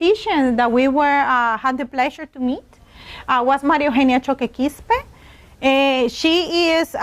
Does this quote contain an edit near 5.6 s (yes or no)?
no